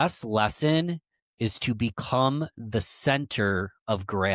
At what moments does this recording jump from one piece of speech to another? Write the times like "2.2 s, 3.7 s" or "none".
none